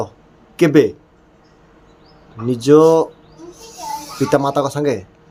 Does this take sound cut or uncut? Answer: uncut